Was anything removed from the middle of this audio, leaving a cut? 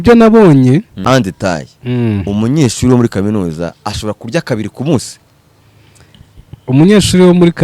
yes; 1 cut; at 0.9 s

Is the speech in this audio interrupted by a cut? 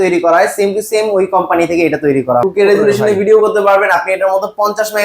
yes; 1 cut; at 2.5 s

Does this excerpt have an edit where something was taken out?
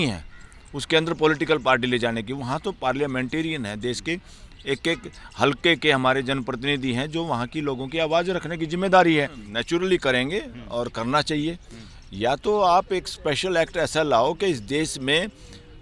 yes; 1 cut; at 9.5 s

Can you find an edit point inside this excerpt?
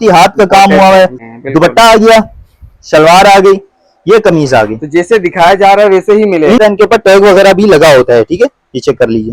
yes; 2 cuts; at 1.3 s, 6.6 s

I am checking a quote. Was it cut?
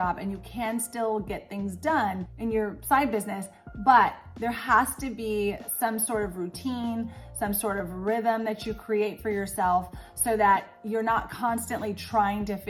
no; 0 cuts

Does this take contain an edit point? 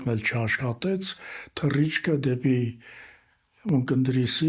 no; 0 cuts

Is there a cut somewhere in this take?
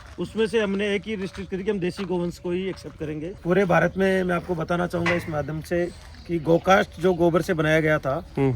yes; 1 cut; at 3.3 s

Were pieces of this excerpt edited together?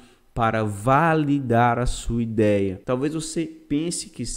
yes; 1 cut; at 2.8 s

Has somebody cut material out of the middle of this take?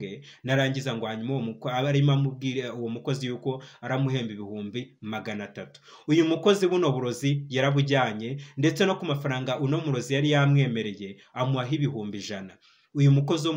no; 0 cuts

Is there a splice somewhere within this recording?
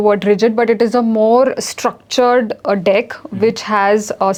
no; 0 cuts

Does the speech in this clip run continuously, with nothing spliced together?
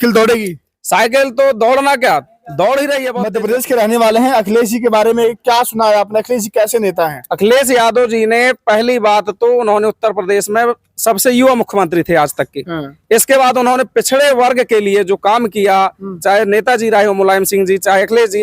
no; 1 cut; at 3.2 s

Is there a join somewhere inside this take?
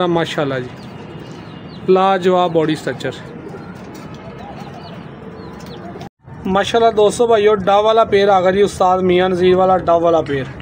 no; 0 cuts

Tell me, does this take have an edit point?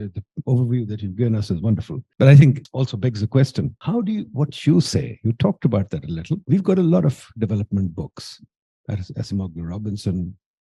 yes; 4 cuts; at 2.0 s, 2.7 s, 3.8 s, 6.4 s

